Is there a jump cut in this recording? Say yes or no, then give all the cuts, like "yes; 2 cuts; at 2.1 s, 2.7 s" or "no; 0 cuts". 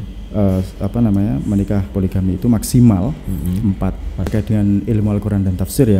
yes; 1 cut; at 4.3 s